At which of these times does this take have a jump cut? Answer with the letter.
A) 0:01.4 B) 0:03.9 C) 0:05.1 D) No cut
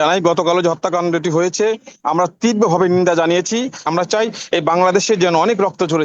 B